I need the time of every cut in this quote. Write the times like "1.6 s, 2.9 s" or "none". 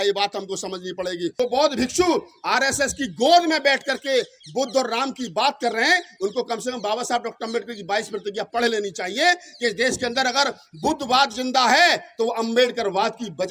1.3 s

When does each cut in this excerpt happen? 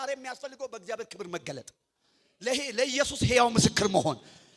none

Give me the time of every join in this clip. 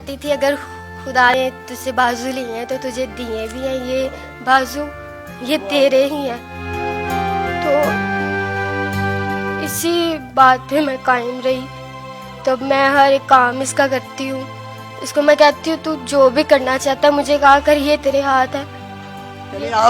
1.3 s

